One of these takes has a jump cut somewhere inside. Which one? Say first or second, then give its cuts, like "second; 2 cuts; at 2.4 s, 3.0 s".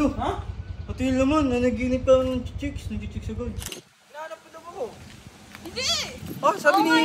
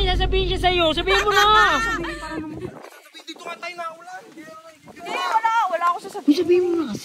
first; 1 cut; at 3.6 s